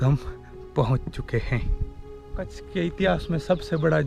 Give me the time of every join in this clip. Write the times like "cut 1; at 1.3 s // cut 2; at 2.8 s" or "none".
cut 1; at 2.6 s